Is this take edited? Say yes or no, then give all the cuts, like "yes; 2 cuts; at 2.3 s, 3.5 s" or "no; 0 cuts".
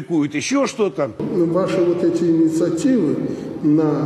yes; 1 cut; at 1.2 s